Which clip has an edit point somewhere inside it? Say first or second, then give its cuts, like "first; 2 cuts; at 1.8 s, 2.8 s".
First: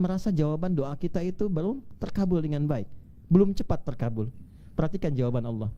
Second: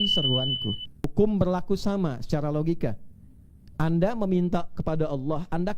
second; 1 cut; at 1.0 s